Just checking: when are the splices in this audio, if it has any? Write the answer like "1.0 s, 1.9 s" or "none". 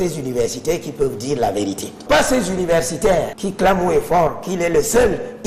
2.0 s